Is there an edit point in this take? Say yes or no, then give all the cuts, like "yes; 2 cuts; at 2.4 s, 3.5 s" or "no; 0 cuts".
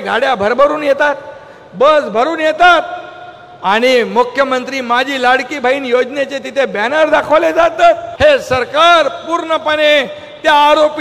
yes; 1 cut; at 8.1 s